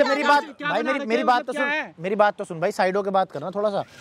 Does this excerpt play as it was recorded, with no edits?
yes; 0 cuts

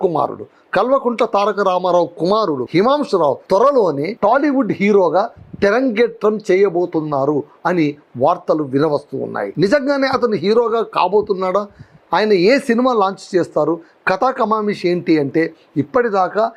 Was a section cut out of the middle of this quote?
no; 0 cuts

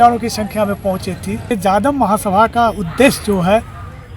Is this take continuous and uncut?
no; 1 cut; at 1.5 s

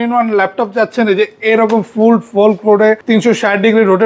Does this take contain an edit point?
yes; 1 cut; at 3.0 s

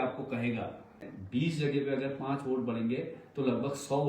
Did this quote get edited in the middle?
yes; 1 cut; at 1.0 s

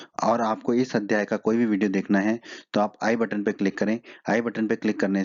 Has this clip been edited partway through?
no; 0 cuts

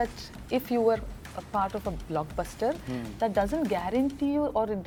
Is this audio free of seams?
yes; 0 cuts

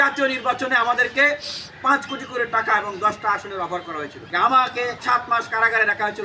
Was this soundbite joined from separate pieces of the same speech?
yes; 2 cuts; at 4.2 s, 5.0 s

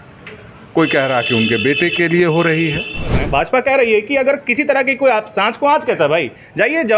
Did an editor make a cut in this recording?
yes; 1 cut; at 3.2 s

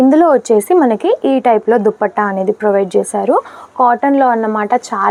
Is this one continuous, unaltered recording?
yes; 0 cuts

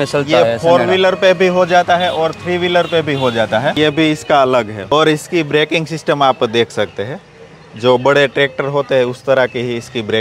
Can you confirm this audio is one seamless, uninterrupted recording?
no; 1 cut; at 3.8 s

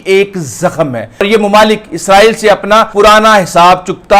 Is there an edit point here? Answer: yes; 2 cuts; at 1.2 s, 2.9 s

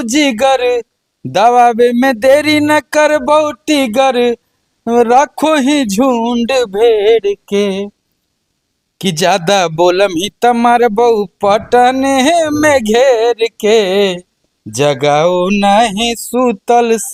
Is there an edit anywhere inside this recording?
no; 0 cuts

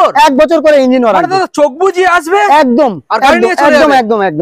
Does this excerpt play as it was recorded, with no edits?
yes; 0 cuts

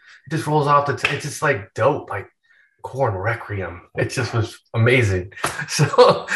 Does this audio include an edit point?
no; 0 cuts

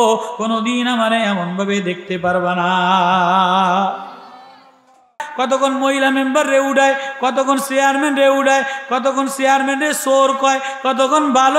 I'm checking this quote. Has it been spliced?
yes; 1 cut; at 5.2 s

